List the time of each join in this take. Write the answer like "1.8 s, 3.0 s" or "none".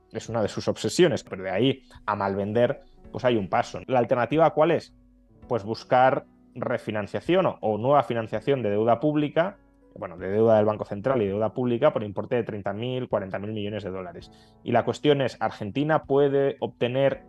1.3 s, 3.8 s